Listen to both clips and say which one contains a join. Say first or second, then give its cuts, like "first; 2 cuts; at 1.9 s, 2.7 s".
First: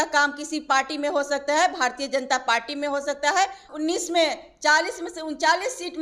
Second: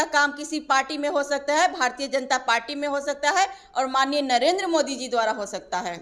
first; 1 cut; at 3.6 s